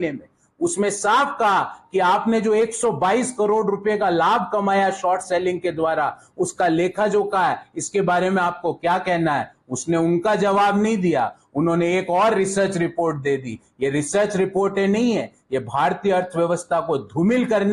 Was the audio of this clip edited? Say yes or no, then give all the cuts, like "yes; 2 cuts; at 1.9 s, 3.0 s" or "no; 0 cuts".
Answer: no; 0 cuts